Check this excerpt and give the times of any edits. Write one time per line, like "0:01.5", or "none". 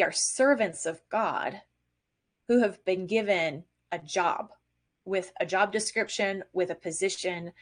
none